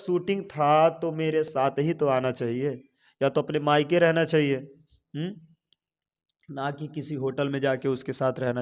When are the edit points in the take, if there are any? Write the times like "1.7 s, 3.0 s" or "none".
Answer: none